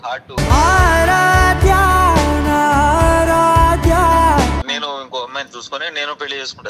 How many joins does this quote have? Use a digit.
1